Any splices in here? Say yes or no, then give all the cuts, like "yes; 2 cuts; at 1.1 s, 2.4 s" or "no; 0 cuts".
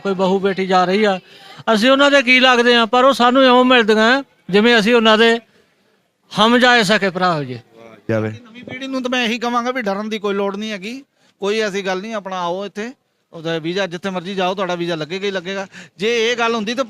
yes; 1 cut; at 8.1 s